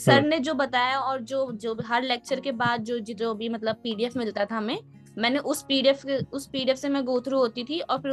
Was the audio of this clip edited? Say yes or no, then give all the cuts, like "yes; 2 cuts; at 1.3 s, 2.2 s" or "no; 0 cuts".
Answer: no; 0 cuts